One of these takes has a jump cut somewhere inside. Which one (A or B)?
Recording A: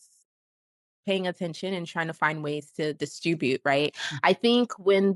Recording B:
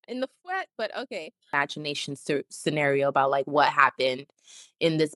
B